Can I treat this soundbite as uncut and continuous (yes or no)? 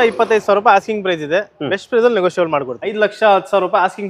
no